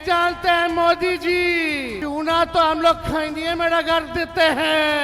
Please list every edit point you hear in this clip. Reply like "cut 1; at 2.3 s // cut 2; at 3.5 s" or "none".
cut 1; at 1.9 s